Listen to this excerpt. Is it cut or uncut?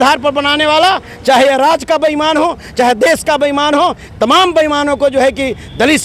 uncut